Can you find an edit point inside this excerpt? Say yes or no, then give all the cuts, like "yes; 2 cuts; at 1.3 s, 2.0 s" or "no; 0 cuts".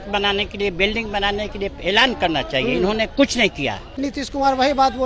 yes; 1 cut; at 4.0 s